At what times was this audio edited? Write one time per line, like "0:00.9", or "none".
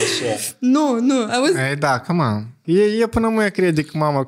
0:02.6